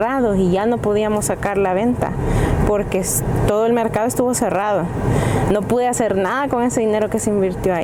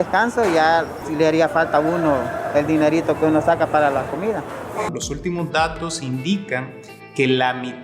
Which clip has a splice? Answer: second; 2 cuts; at 1.0 s, 4.9 s

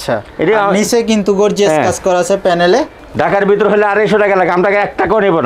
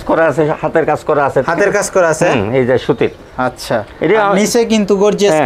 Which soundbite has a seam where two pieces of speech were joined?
first; 1 cut; at 3.0 s

